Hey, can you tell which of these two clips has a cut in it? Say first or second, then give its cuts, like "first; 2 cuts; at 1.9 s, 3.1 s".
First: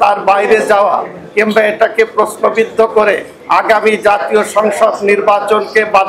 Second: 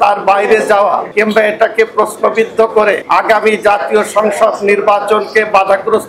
second; 2 cuts; at 1.1 s, 3.0 s